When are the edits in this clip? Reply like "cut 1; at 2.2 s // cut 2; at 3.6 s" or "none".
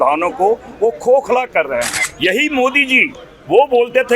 cut 1; at 2.0 s

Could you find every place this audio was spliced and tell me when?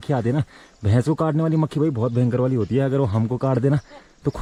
none

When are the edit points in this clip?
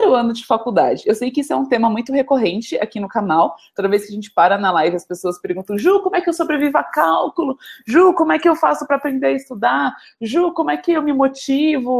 none

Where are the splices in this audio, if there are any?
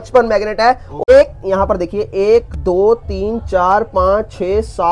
cut 1; at 1.1 s

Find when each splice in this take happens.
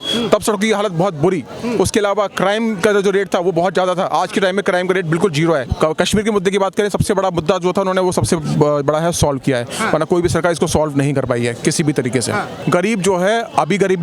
cut 1; at 5.7 s // cut 2; at 12.5 s

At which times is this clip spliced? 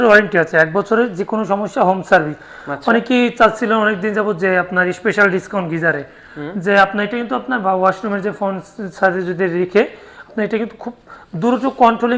none

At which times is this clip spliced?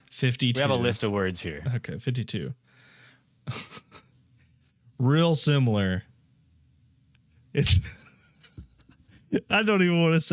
none

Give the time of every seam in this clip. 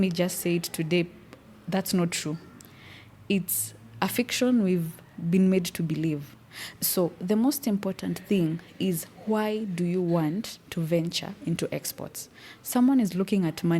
none

